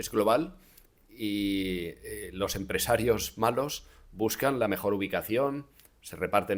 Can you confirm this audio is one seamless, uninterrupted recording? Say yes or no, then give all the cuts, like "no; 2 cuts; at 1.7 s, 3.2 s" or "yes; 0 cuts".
yes; 0 cuts